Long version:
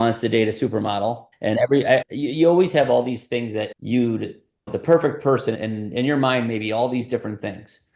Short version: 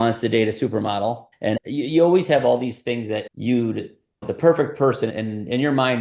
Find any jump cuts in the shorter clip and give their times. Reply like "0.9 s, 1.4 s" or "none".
1.6 s